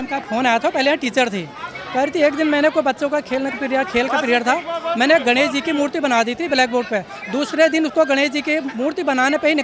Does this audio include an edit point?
no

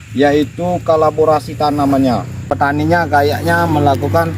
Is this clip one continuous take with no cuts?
no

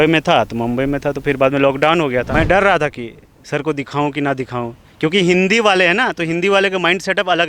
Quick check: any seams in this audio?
yes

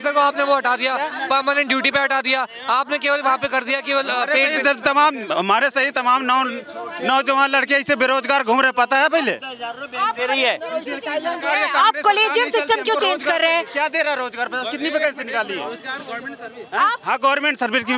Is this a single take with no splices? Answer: yes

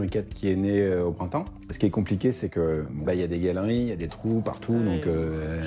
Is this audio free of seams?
no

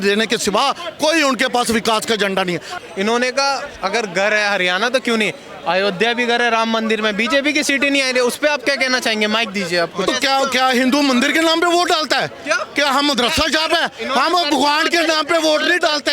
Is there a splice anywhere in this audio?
yes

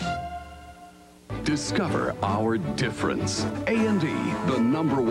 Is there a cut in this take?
yes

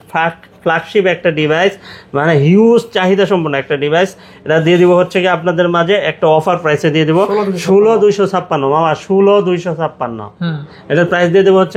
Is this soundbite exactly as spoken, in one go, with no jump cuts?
yes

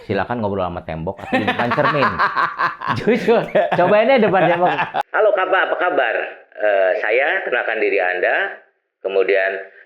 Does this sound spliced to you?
yes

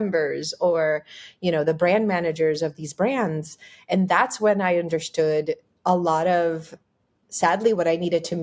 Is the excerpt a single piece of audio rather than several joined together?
yes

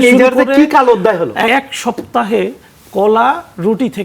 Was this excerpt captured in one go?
no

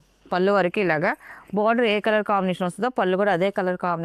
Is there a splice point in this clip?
no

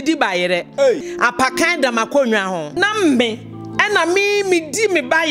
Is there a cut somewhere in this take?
yes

